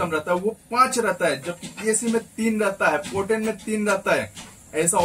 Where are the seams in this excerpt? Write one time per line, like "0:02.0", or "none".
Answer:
none